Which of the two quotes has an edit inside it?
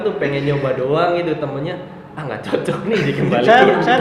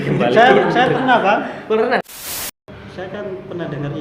second; 1 cut; at 2.4 s

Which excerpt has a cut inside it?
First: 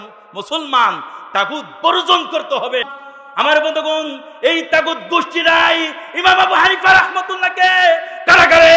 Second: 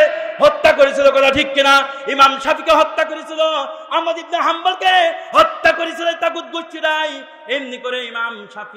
first; 1 cut; at 3.0 s

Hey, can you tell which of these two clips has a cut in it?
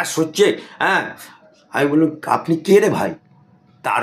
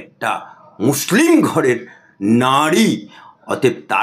first; 1 cut; at 3.0 s

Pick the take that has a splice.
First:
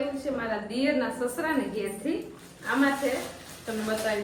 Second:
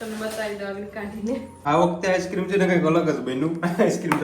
second; 1 cut; at 1.5 s

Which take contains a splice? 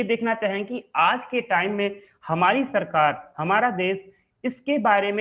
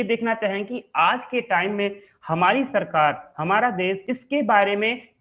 second; 1 cut; at 4.1 s

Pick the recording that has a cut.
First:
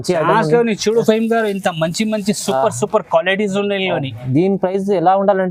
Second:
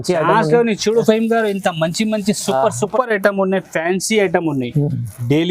second; 1 cut; at 2.9 s

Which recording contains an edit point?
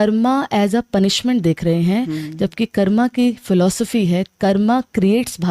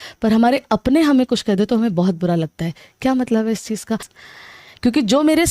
second; 1 cut; at 4.1 s

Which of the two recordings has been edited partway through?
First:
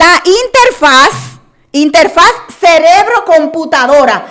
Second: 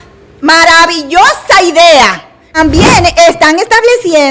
second; 1 cut; at 2.6 s

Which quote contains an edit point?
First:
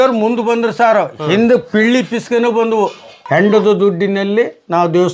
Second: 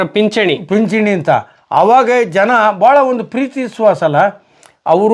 first; 1 cut; at 3.1 s

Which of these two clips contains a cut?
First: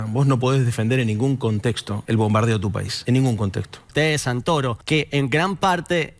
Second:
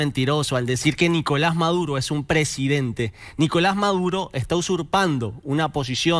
first; 4 cuts; at 1.9 s, 2.9 s, 3.9 s, 4.8 s

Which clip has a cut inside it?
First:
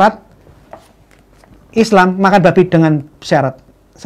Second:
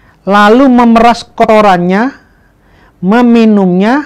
second; 1 cut; at 1.4 s

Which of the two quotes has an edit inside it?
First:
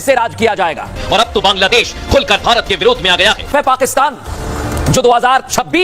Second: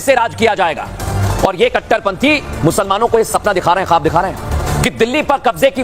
first; 2 cuts; at 0.9 s, 3.5 s

